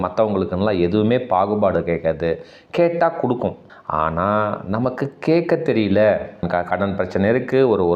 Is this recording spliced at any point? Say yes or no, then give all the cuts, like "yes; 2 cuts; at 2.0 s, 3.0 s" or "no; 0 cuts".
yes; 2 cuts; at 3.7 s, 6.4 s